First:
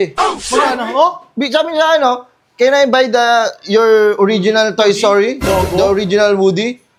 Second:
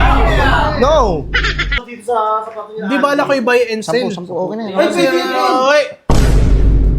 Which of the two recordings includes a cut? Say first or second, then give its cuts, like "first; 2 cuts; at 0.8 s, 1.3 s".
second; 1 cut; at 1.8 s